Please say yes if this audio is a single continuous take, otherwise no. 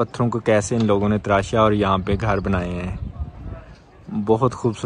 yes